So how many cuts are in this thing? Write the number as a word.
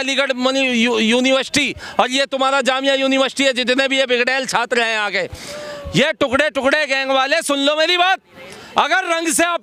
zero